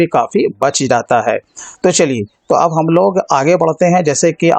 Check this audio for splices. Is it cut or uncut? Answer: uncut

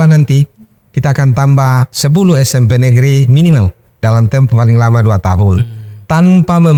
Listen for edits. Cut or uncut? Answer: uncut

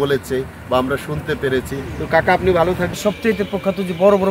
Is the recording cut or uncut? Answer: uncut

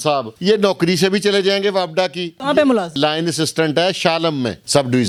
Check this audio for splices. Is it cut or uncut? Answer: uncut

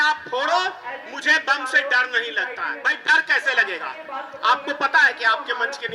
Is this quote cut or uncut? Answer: cut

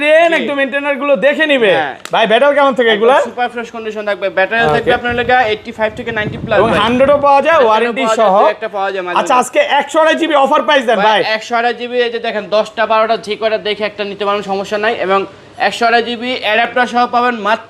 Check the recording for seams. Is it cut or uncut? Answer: uncut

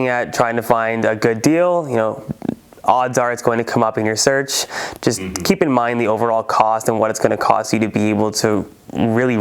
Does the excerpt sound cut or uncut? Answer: uncut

